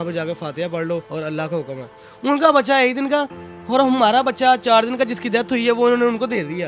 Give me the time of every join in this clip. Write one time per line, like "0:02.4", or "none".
0:01.1
0:02.1